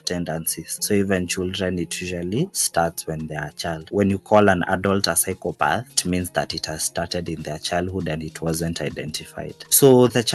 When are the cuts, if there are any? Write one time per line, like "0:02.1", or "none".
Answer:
none